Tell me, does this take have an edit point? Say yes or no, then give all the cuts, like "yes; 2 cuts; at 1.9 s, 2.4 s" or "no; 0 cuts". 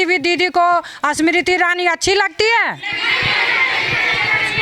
no; 0 cuts